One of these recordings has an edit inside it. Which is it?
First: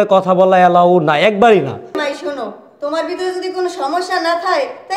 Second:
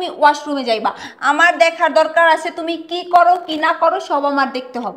first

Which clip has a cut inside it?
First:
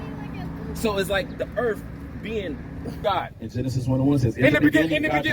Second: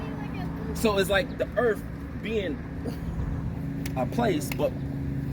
first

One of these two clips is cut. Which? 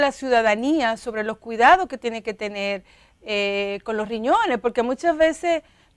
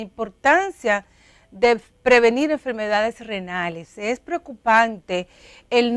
second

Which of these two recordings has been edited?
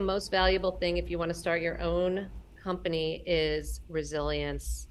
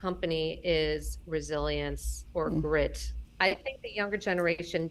second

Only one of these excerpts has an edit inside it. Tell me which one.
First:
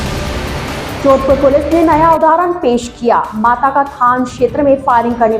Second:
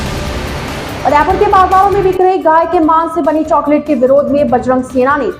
first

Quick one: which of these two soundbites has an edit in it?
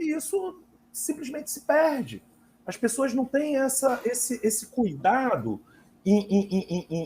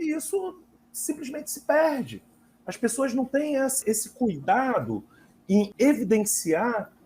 second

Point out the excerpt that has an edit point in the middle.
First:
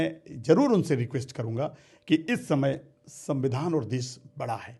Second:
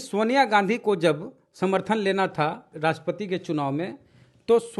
second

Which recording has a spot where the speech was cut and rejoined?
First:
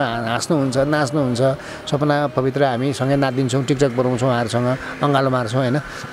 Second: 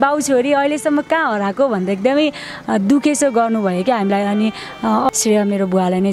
second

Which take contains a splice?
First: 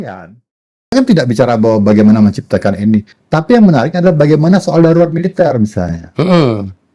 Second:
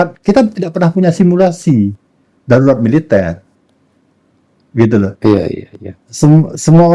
first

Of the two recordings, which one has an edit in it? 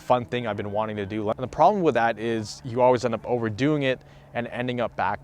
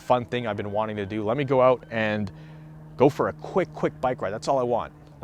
first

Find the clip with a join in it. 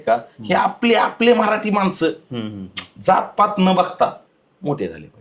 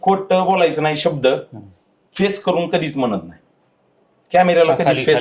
first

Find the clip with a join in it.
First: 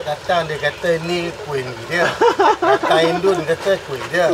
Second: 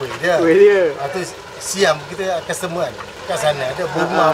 second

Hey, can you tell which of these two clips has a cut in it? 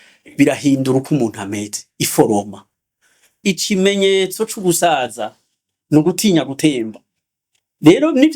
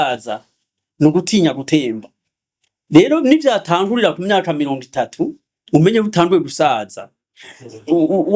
first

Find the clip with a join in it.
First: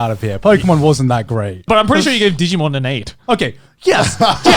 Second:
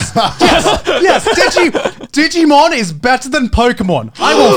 first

